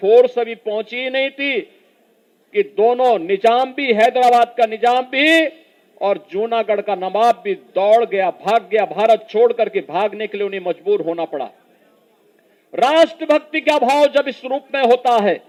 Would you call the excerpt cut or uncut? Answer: uncut